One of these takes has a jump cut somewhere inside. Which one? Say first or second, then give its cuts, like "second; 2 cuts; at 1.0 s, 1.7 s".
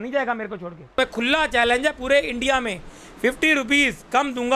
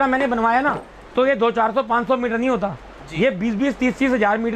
first; 1 cut; at 1.0 s